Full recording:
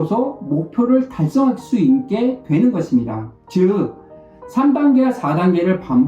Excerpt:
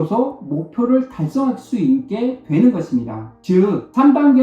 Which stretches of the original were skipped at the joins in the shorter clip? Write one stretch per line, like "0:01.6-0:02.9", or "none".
0:03.4-0:04.0